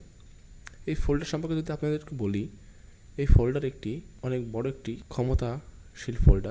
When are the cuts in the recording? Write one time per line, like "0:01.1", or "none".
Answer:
0:04.1
0:05.1